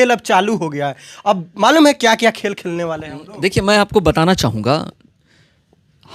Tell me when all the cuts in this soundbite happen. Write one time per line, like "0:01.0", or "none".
none